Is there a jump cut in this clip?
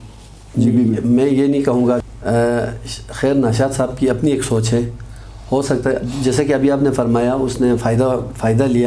yes; 1 cut; at 2.0 s

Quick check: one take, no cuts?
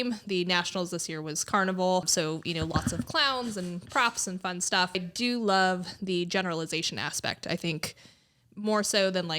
no; 2 cuts; at 2.1 s, 5.0 s

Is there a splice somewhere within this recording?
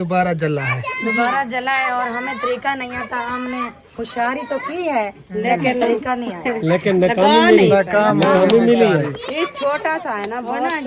no; 0 cuts

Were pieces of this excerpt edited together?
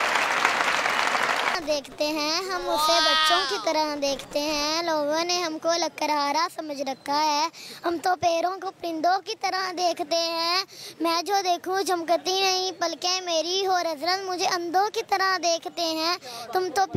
yes; 1 cut; at 1.6 s

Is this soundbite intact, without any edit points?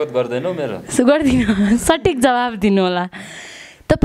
yes; 0 cuts

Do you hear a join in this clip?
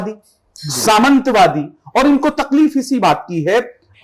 no; 0 cuts

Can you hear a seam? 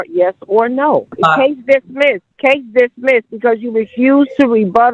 yes; 2 cuts; at 1.1 s, 2.3 s

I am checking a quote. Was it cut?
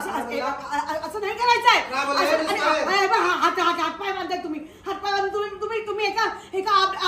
no; 0 cuts

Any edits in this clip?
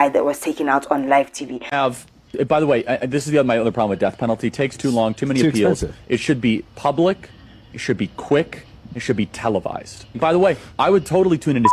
yes; 1 cut; at 1.6 s

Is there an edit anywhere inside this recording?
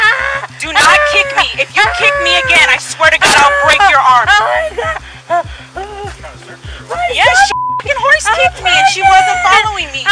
no; 0 cuts

